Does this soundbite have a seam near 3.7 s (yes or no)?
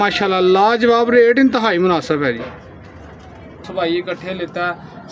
yes